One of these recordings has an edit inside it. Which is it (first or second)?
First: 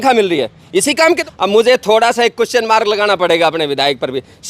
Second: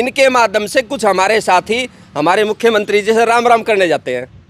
first